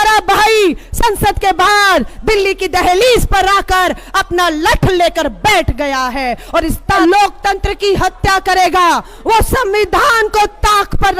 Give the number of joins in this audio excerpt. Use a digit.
1